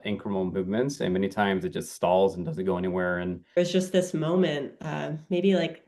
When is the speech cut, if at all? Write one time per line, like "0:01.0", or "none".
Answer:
0:03.6